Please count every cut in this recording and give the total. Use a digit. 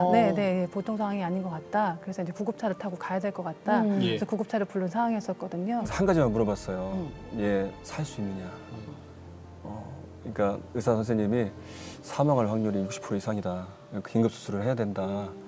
1